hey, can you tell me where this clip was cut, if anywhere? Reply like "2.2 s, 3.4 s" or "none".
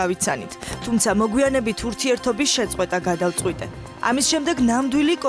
none